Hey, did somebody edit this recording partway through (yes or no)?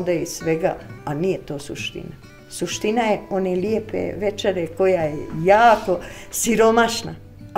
no